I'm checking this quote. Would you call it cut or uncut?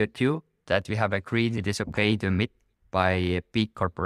cut